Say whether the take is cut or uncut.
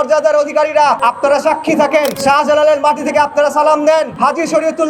cut